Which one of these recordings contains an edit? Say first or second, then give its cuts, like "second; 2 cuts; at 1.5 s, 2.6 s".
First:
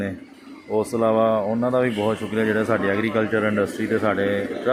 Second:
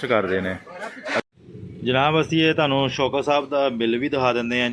second; 1 cut; at 1.2 s